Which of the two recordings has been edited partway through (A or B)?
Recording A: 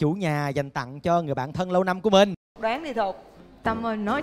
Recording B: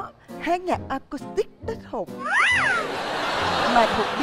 A